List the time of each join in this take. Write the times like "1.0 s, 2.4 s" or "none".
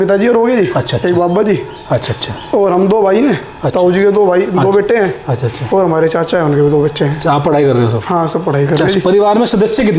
none